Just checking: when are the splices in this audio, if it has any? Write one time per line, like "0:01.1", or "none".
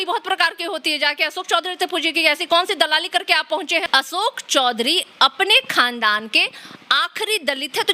0:03.9